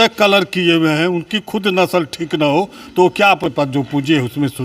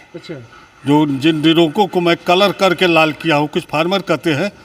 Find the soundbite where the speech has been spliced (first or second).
first